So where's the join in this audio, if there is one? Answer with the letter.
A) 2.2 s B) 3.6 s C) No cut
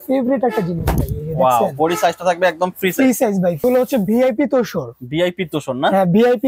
B